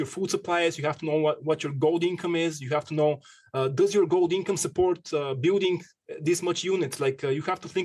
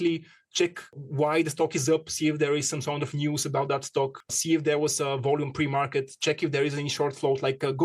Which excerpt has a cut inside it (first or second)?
second